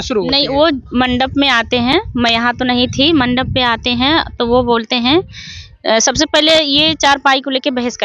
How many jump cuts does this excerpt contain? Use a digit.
0